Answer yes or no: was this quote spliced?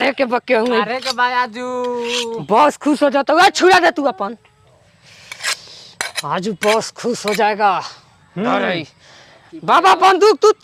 no